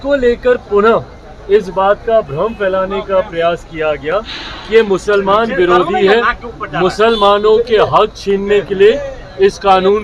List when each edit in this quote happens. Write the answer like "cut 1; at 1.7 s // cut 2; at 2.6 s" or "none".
none